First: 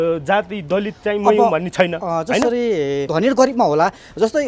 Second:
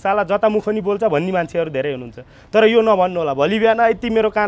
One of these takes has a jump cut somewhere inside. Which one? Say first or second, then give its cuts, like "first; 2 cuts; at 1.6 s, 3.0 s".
first; 1 cut; at 3.1 s